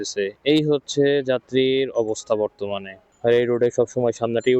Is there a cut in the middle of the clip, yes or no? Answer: yes